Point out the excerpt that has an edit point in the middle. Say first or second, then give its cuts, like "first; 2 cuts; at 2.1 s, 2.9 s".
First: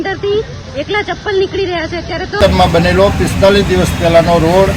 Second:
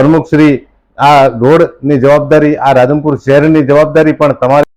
first; 1 cut; at 2.4 s